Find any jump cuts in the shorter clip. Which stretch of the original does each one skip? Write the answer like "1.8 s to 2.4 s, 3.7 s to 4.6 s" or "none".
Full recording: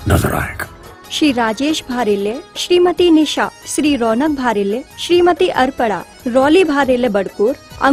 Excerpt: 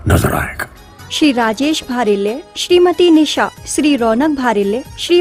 none